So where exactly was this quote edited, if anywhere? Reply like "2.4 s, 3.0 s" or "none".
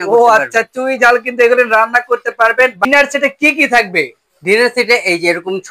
2.8 s